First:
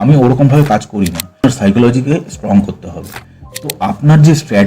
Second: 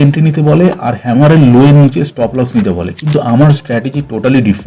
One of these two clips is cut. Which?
first; 1 cut; at 1.4 s

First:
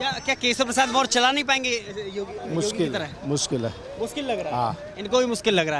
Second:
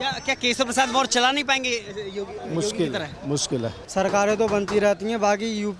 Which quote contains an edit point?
second; 1 cut; at 3.8 s

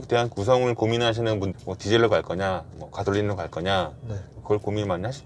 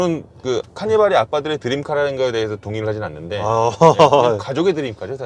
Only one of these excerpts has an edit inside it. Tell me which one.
first; 1 cut; at 1.5 s

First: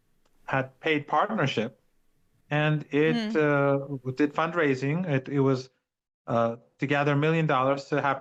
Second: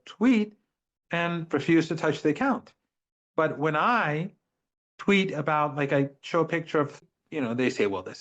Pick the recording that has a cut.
second; 1 cut; at 7.0 s

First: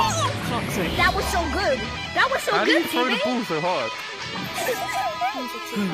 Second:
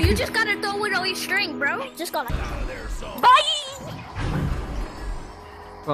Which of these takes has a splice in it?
second; 1 cut; at 2.3 s

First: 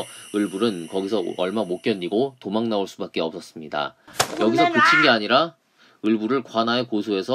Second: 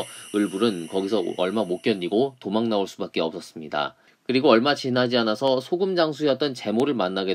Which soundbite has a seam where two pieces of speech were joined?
first; 1 cut; at 4.1 s

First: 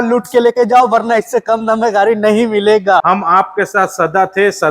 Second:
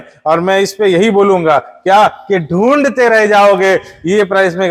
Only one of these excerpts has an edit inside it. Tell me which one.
first; 1 cut; at 3.0 s

